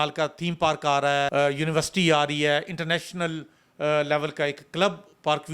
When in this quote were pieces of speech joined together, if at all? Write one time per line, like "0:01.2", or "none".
0:01.3